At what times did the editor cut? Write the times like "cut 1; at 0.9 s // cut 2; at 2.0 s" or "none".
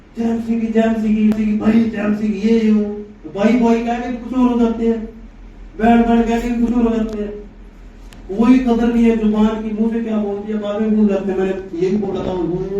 cut 1; at 1.4 s